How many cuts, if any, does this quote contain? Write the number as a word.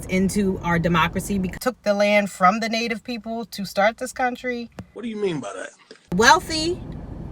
two